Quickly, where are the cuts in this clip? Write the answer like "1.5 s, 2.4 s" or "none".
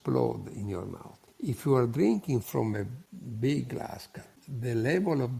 4.4 s